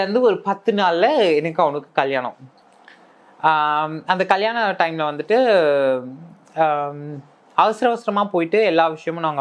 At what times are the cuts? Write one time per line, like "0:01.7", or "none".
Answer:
none